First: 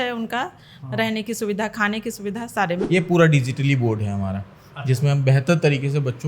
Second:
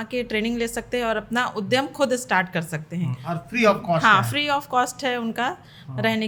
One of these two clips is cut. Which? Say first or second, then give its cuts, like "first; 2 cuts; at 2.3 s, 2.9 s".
first; 1 cut; at 2.8 s